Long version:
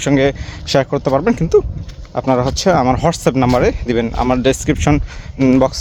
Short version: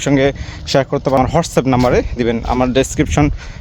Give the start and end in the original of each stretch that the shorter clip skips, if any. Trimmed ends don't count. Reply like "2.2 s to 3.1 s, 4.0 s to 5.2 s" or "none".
1.2 s to 2.9 s